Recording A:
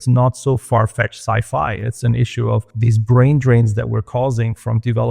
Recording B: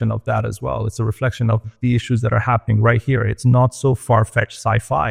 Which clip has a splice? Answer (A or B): A